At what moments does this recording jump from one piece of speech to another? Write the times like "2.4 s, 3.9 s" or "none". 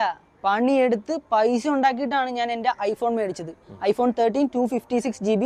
none